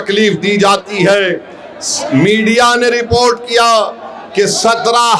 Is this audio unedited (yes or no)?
yes